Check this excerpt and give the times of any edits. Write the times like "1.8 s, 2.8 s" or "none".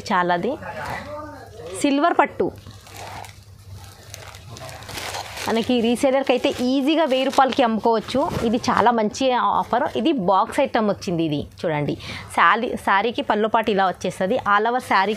none